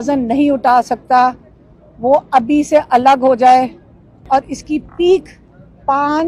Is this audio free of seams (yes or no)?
no